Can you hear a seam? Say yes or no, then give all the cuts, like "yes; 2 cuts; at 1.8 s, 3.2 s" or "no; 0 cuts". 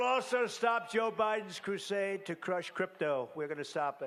no; 0 cuts